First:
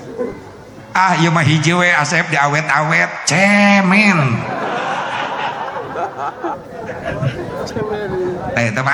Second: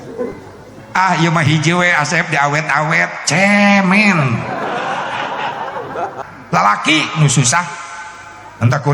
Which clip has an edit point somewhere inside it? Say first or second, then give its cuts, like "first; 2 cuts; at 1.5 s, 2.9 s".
second; 1 cut; at 6.2 s